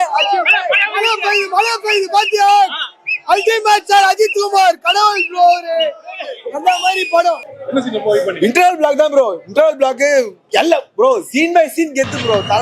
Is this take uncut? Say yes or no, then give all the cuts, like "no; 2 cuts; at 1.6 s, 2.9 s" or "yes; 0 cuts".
no; 1 cut; at 7.4 s